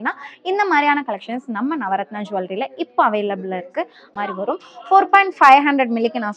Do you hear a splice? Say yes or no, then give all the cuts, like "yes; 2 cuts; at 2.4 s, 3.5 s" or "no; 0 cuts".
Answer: yes; 1 cut; at 4.1 s